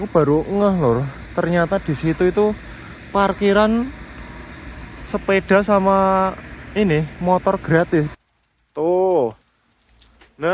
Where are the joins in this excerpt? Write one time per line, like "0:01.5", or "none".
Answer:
0:08.1